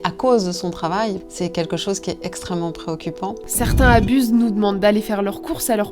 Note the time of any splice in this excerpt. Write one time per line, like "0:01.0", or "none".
0:01.3
0:03.4